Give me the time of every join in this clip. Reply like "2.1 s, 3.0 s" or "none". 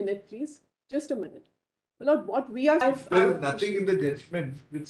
2.8 s